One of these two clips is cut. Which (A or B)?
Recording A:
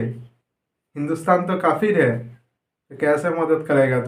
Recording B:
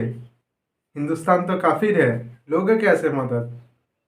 B